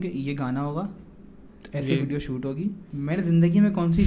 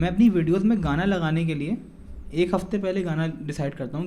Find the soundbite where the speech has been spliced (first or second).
first